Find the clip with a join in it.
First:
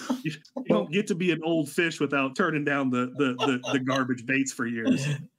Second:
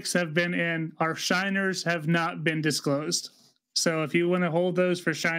first; 1 cut; at 2.3 s

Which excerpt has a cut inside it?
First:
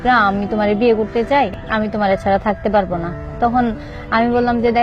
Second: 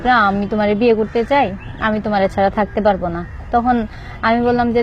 first; 1 cut; at 1.6 s

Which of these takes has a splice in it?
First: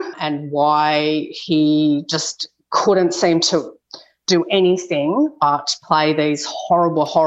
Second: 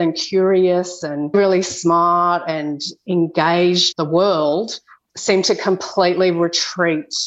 second; 2 cuts; at 1.3 s, 3.9 s

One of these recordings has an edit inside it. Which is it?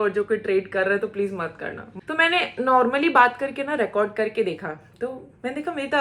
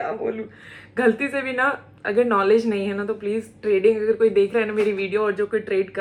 first; 1 cut; at 1.8 s

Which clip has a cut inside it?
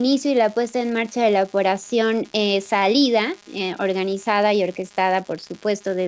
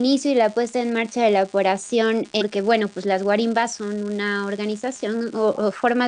first; 1 cut; at 2.4 s

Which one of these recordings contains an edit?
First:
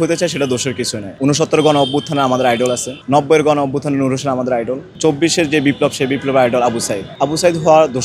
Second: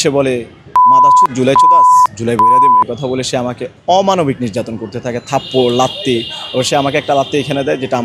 first; 4 cuts; at 1.1 s, 2.9 s, 4.8 s, 7.0 s

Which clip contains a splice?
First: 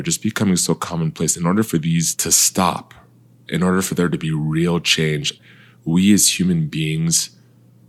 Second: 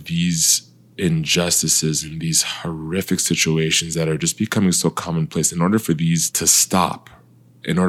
first; 1 cut; at 5.3 s

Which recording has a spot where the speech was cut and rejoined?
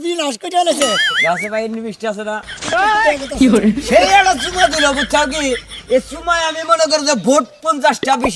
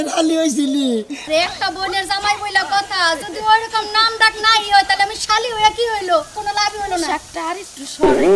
second; 1 cut; at 1.1 s

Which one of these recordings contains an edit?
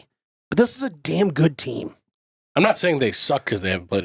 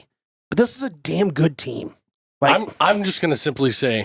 first; 1 cut; at 2.3 s

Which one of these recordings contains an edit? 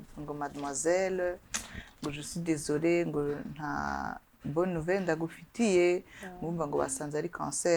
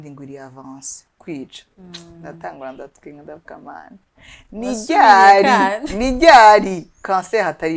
second; 1 cut; at 1.2 s

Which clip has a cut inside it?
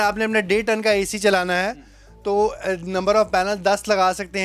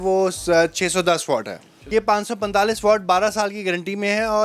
second; 1 cut; at 1.9 s

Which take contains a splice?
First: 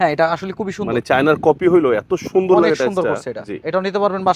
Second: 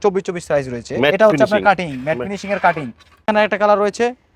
second; 1 cut; at 3.2 s

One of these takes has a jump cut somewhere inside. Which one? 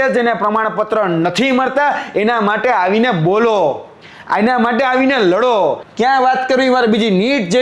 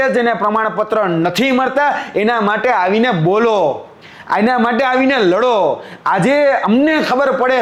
first; 1 cut; at 5.9 s

